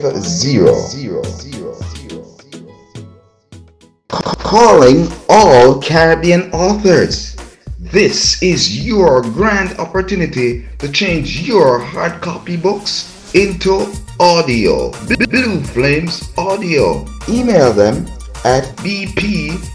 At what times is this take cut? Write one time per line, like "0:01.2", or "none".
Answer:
0:03.9